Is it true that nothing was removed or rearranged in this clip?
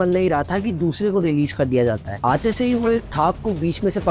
yes; 0 cuts

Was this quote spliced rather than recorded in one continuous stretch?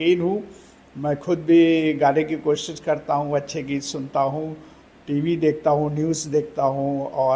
no; 0 cuts

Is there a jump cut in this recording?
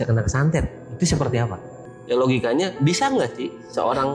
yes; 1 cut; at 1.7 s

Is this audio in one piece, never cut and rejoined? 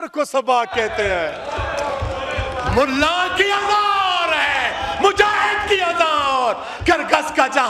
yes; 0 cuts

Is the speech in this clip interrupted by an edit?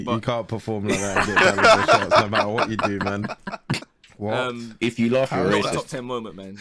yes; 1 cut; at 3.9 s

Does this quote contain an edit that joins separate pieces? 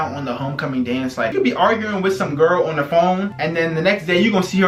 yes; 1 cut; at 1.3 s

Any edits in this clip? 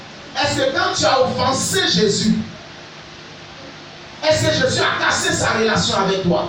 no; 0 cuts

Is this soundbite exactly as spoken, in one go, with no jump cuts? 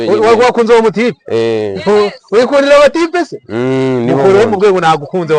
yes; 0 cuts

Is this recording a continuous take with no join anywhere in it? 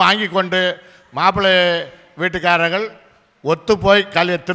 yes; 0 cuts

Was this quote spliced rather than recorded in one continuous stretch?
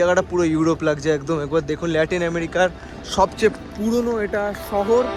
no; 0 cuts

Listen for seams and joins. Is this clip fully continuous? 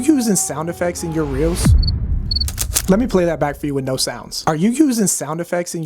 no; 1 cut; at 1.5 s

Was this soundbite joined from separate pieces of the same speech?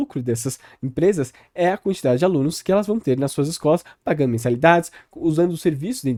no; 0 cuts

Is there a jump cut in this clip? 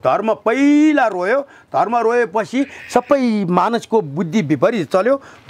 no; 0 cuts

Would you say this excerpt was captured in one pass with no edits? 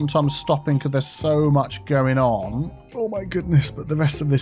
no; 1 cut; at 2.8 s

